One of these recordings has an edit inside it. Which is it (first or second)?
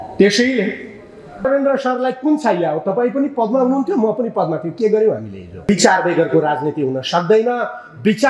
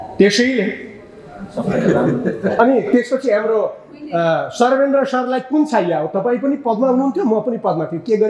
first